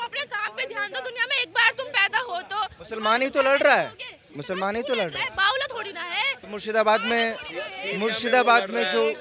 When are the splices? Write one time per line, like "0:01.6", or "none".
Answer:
none